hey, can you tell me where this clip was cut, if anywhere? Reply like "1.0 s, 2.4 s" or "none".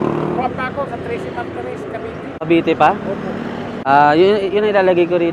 2.3 s, 3.7 s